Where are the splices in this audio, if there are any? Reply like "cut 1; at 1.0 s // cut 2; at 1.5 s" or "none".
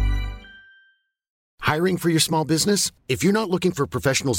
cut 1; at 1.4 s